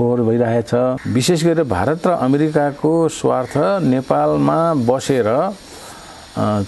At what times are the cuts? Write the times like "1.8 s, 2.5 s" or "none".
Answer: 1.0 s